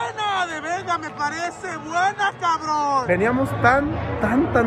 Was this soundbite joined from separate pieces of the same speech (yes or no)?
yes